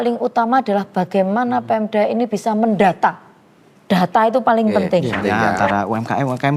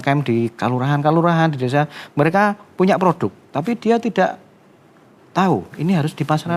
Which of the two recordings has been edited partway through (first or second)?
first